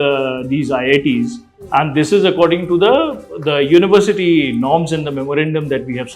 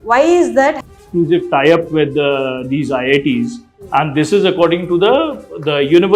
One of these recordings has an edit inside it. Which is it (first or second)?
second